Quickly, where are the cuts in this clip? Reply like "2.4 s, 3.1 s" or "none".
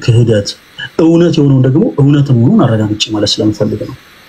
none